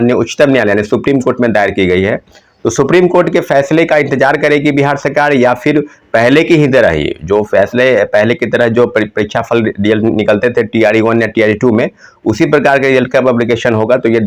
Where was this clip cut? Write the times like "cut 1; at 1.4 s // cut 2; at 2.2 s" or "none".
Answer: none